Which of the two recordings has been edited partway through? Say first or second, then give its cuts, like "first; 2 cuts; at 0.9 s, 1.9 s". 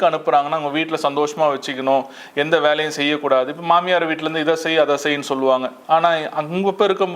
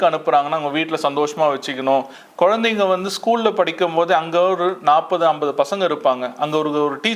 second; 1 cut; at 2.2 s